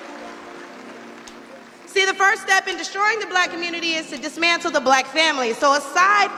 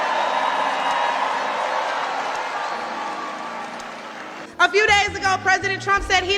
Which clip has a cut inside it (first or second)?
second